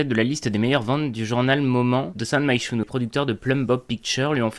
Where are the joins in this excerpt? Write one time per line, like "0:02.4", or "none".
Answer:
0:02.9